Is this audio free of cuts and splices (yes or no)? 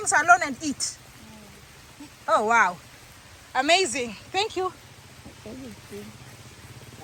yes